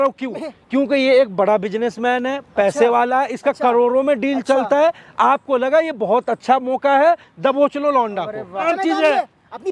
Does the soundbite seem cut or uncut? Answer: cut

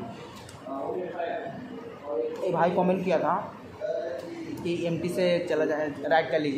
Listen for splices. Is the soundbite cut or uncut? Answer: uncut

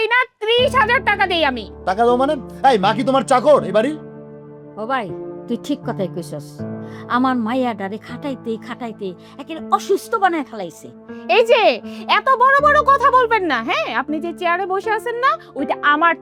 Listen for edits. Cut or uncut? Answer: uncut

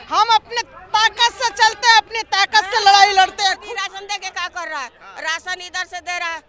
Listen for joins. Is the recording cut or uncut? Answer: cut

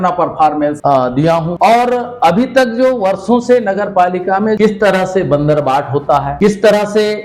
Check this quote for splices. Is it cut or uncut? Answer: cut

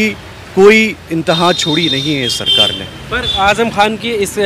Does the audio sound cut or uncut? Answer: uncut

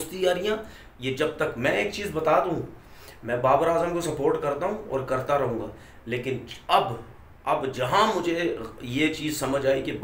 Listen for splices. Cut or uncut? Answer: uncut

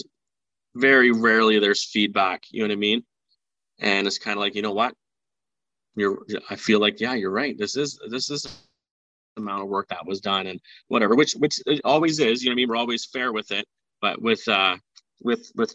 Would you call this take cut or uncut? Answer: uncut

